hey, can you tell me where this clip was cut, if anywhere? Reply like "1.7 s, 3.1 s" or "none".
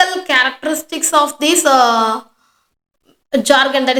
none